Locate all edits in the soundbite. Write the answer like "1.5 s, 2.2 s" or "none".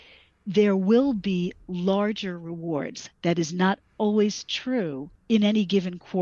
5.1 s